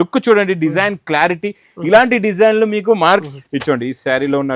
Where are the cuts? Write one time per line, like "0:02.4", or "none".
0:03.2